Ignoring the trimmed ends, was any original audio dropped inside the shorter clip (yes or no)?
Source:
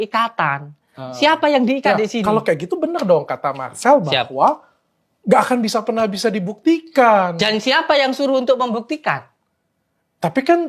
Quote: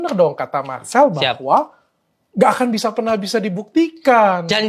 no